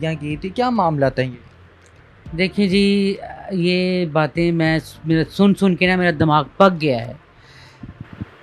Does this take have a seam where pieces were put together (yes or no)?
no